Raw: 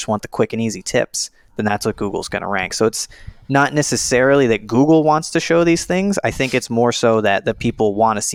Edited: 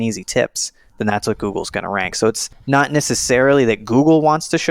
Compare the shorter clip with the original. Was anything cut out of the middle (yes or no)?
yes